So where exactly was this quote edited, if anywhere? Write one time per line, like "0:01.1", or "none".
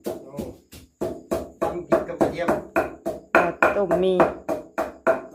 none